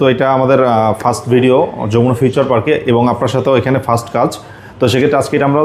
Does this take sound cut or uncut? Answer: uncut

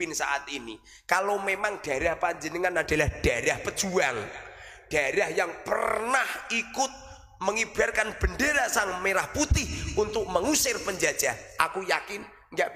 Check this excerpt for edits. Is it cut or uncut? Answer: uncut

